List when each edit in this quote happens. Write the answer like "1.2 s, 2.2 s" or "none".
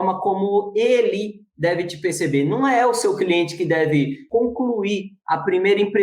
4.2 s